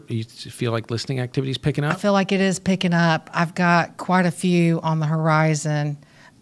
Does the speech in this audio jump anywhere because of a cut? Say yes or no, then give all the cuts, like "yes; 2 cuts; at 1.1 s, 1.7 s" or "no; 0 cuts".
no; 0 cuts